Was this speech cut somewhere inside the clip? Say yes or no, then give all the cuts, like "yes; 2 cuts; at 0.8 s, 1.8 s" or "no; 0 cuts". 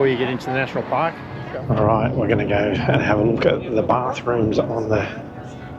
yes; 1 cut; at 1.4 s